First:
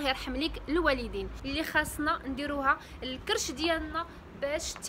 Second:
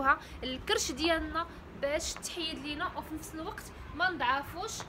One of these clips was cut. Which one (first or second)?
first